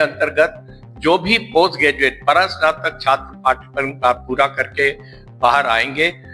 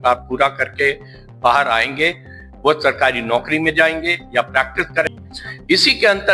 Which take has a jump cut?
second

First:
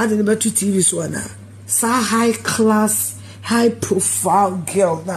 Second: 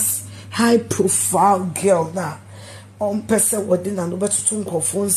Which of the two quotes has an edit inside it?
first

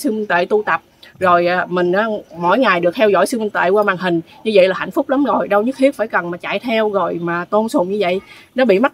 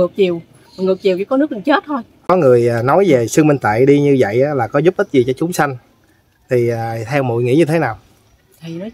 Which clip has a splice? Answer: second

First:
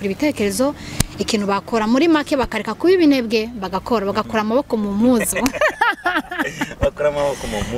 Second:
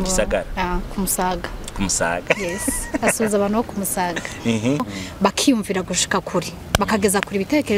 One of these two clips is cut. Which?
second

